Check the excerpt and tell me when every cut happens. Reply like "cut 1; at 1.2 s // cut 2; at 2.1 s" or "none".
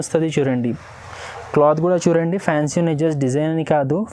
none